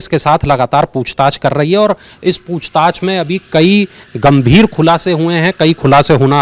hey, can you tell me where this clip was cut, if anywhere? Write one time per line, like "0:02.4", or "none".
none